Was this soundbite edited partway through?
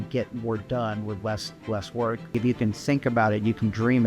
yes; 1 cut; at 2.3 s

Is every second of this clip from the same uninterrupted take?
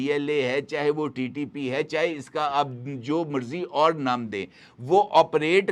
yes; 0 cuts

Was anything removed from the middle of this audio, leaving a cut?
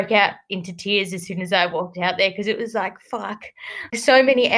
no; 0 cuts

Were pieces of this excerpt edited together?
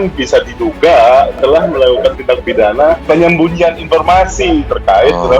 yes; 1 cut; at 3.0 s

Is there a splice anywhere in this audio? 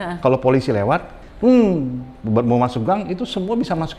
yes; 1 cut; at 1.2 s

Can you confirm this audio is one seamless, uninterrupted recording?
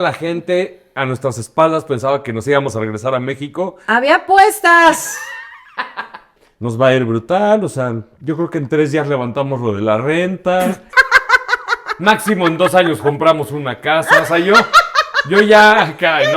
no; 2 cuts; at 6.3 s, 10.8 s

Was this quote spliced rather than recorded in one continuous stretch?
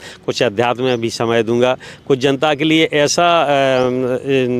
no; 0 cuts

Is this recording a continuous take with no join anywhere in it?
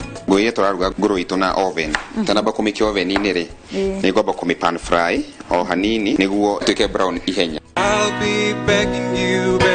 yes; 0 cuts

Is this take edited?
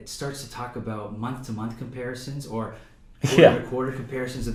no; 0 cuts

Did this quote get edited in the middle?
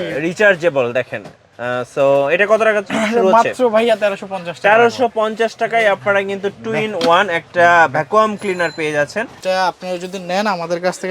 yes; 1 cut; at 9.3 s

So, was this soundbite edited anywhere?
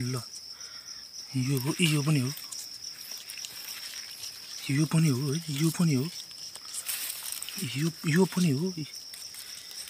no; 0 cuts

